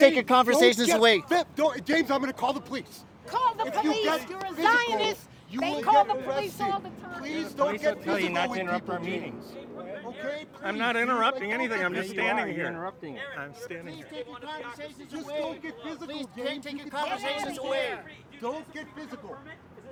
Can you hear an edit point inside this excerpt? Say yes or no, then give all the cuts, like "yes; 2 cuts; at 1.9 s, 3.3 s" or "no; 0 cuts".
no; 0 cuts